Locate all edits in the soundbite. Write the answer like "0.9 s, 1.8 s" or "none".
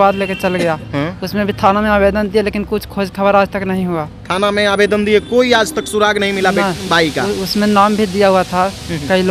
none